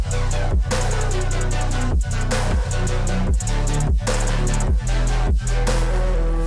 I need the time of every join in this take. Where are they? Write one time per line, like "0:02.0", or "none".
none